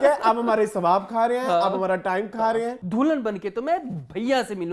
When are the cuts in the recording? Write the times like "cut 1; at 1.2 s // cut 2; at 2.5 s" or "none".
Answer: cut 1; at 2.8 s